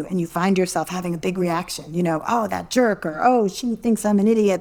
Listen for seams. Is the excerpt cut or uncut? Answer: uncut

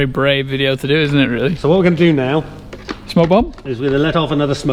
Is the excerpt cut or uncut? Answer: uncut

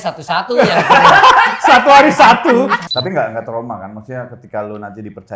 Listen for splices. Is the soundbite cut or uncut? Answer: cut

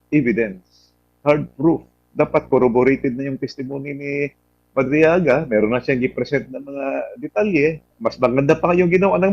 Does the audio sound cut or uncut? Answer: cut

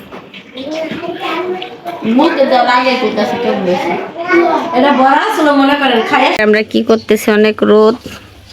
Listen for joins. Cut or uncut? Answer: cut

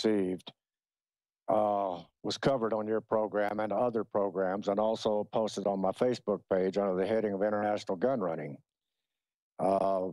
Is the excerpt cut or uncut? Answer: cut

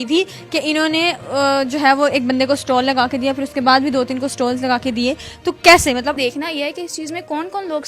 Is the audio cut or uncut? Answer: cut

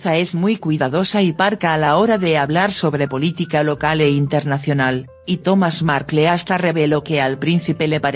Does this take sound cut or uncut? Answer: uncut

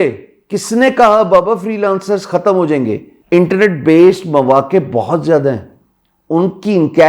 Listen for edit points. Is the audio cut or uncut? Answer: cut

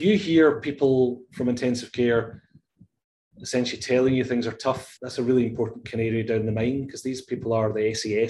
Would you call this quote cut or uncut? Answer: cut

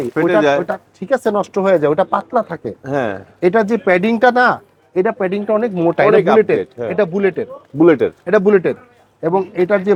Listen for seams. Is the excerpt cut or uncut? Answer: uncut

